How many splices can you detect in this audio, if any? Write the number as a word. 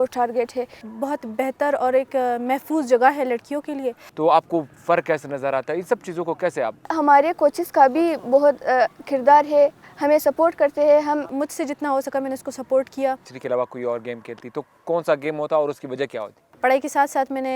six